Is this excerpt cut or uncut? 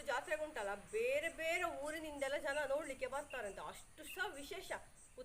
uncut